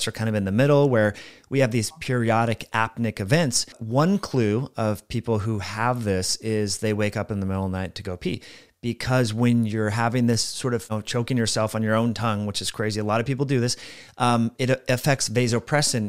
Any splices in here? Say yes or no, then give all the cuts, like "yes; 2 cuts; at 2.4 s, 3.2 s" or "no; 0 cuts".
yes; 2 cuts; at 3.8 s, 10.9 s